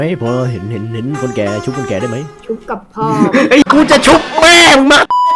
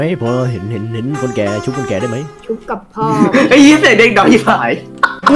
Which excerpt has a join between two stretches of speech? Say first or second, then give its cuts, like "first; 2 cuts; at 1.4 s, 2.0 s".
first; 1 cut; at 3.6 s